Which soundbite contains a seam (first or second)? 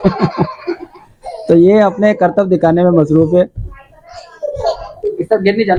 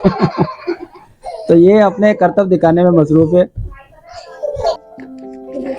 second